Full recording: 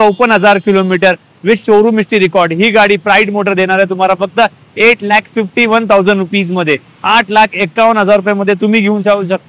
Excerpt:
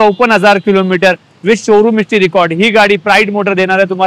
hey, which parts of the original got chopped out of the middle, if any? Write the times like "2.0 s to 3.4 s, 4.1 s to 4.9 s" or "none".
none